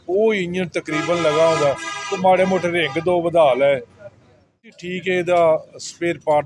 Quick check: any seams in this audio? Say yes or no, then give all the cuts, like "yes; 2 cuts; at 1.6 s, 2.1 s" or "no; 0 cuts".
yes; 1 cut; at 4.8 s